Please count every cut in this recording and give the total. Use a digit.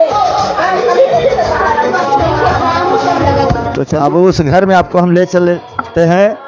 1